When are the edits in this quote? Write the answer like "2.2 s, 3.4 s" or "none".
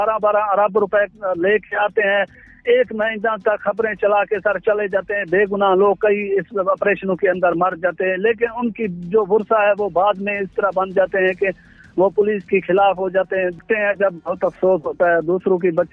2.4 s, 13.5 s